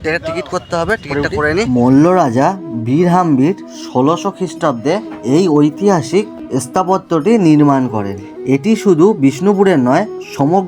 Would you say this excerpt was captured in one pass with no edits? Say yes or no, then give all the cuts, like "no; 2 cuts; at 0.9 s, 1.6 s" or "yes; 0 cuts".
no; 1 cut; at 1.7 s